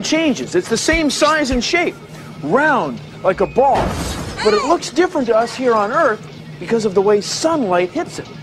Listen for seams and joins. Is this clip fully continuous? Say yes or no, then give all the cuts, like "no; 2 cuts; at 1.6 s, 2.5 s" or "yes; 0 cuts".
yes; 0 cuts